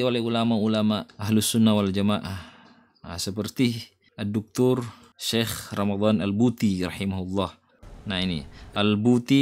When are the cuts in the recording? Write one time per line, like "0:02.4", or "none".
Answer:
none